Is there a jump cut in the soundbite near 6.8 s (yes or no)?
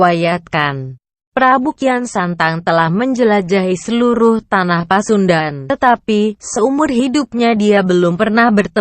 no